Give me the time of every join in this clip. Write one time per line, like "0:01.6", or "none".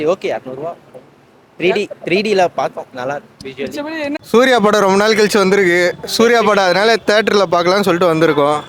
0:04.2